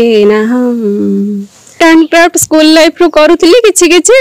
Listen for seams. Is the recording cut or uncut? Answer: cut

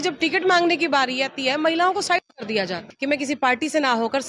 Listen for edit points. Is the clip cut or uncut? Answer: cut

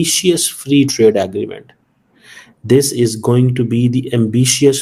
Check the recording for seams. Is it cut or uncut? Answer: uncut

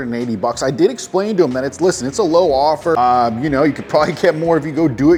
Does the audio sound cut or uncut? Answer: uncut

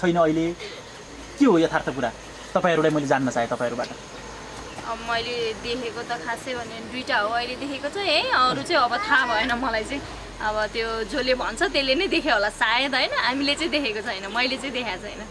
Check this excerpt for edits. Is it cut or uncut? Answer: uncut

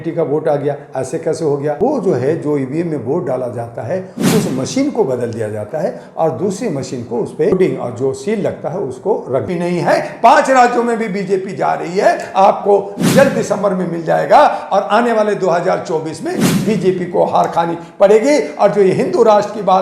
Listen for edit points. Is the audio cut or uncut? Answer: cut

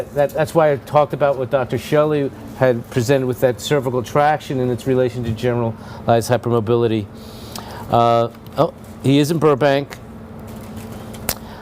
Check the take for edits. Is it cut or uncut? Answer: cut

